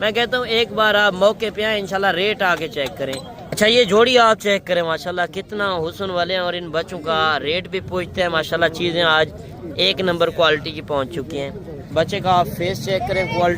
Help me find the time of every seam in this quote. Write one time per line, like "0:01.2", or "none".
0:03.5
0:11.9

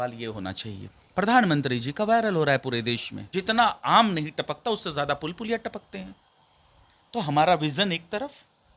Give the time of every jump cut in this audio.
0:00.9
0:03.1

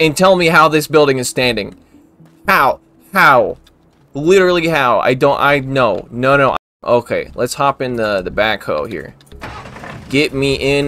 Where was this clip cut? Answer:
0:06.7

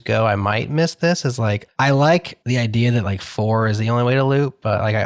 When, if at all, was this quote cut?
0:01.7
0:02.3

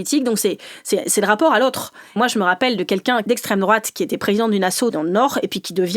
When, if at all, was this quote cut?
0:02.1
0:03.2
0:04.9

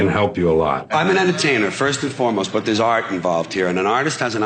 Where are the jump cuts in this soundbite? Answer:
0:00.9

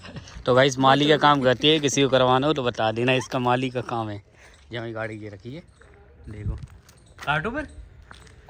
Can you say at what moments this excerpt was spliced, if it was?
none

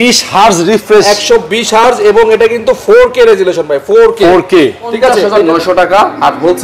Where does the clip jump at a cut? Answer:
0:05.3

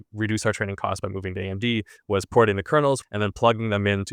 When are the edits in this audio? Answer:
0:03.0

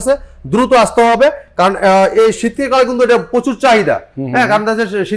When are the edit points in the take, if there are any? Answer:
none

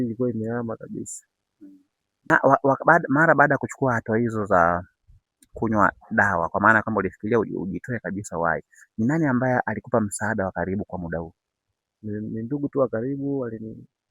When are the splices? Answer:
0:02.3

